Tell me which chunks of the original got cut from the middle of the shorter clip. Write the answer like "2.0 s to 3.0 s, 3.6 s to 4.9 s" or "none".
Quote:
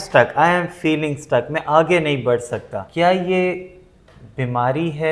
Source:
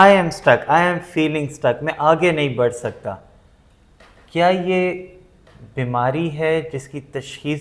3.1 s to 4.2 s